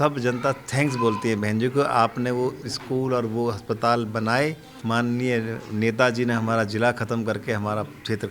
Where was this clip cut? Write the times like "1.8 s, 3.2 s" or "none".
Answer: 4.7 s